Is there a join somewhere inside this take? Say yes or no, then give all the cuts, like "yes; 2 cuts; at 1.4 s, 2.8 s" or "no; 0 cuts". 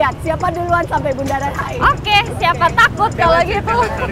no; 0 cuts